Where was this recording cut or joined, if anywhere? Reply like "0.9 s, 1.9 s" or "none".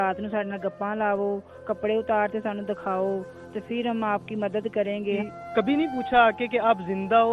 5.0 s